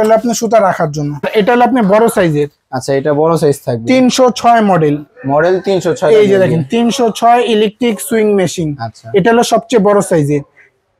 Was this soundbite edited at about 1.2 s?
yes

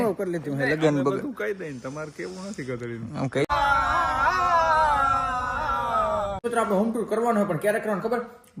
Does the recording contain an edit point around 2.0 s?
no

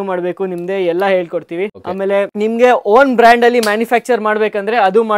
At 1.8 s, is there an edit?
yes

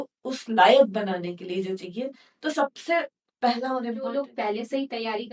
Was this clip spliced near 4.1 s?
yes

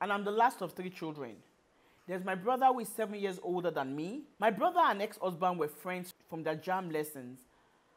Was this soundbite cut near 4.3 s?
yes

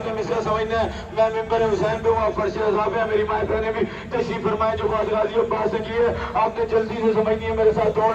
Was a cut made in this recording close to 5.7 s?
no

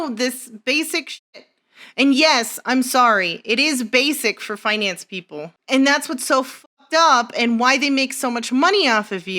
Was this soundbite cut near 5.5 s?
yes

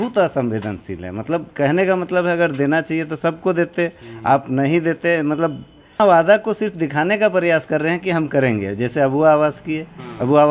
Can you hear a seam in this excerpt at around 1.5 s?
no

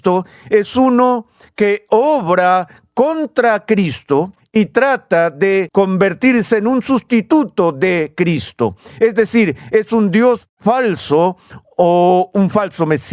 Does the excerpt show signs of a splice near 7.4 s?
no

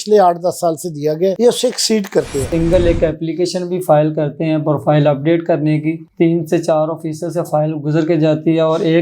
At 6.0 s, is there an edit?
yes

